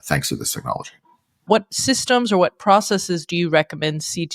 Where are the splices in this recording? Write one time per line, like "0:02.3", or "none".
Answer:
0:01.5